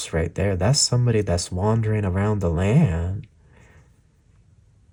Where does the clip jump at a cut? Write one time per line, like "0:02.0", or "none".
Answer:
none